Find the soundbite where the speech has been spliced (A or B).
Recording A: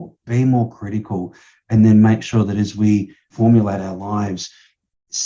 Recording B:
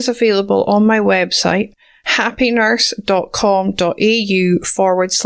A